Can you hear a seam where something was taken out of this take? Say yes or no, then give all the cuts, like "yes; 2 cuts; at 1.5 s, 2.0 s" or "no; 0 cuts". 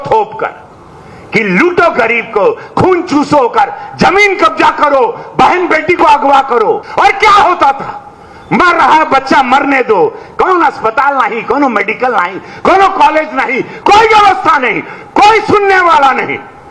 yes; 1 cut; at 6.9 s